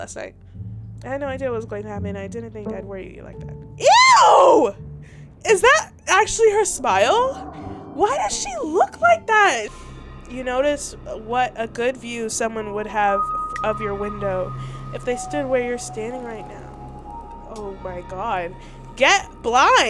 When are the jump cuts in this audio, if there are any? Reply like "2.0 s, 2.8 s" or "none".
9.7 s